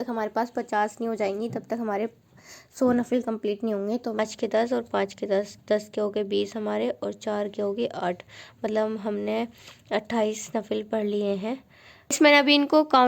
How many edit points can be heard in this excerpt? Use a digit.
2